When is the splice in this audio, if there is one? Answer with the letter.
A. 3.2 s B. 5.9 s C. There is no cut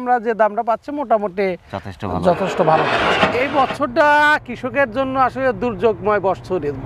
A